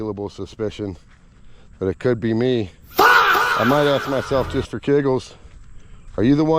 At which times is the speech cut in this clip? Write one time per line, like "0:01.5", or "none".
0:02.8
0:03.6